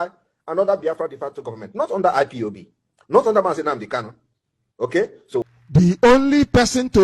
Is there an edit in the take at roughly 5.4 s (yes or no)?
yes